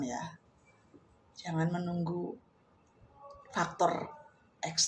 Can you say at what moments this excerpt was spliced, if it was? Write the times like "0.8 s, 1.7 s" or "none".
none